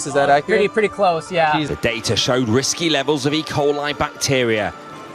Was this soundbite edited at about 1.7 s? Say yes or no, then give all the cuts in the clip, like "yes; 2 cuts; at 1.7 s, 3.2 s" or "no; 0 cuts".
yes; 1 cut; at 1.7 s